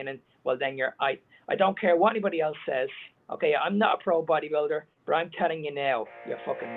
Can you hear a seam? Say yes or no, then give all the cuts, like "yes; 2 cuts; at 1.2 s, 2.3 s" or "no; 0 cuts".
no; 0 cuts